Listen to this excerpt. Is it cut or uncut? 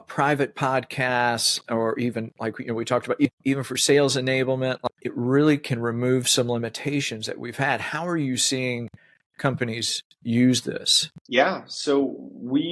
cut